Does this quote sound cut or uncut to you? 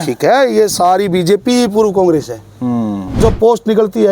cut